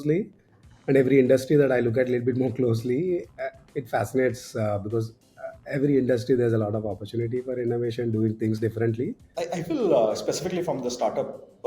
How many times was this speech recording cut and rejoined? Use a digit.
1